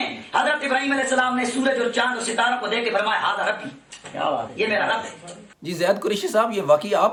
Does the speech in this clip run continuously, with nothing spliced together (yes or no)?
yes